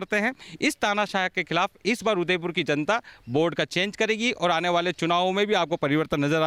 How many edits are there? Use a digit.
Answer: 0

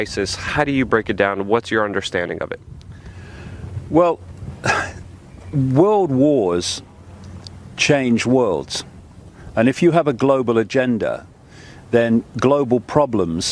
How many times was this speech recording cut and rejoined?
0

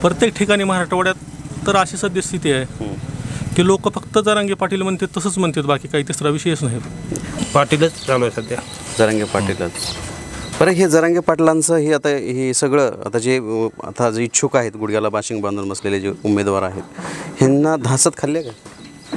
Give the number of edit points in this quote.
1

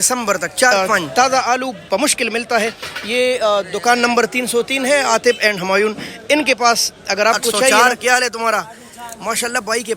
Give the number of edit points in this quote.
2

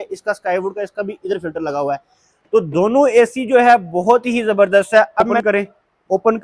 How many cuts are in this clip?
1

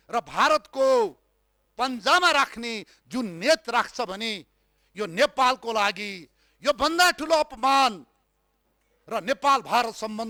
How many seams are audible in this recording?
0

